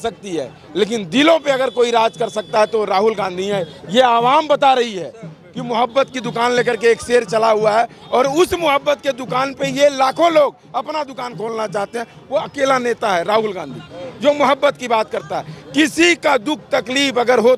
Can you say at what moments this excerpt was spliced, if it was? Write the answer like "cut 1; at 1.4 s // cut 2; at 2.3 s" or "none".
none